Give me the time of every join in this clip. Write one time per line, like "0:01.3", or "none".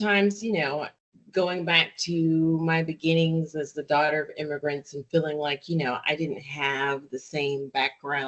0:01.0